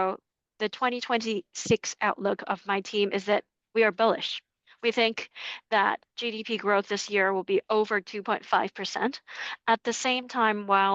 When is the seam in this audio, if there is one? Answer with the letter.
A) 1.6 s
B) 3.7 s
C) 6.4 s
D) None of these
D